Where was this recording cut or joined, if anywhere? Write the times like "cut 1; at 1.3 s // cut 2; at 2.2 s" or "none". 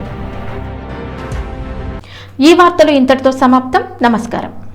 none